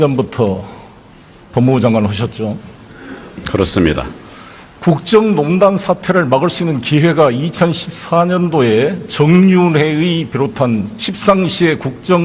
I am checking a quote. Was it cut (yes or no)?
no